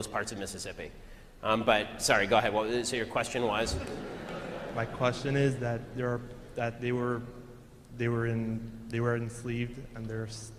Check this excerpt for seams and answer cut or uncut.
uncut